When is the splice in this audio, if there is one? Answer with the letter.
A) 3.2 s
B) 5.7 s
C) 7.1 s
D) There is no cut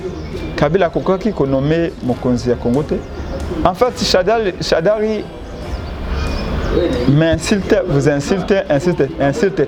D